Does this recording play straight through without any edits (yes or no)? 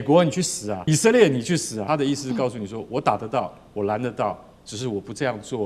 no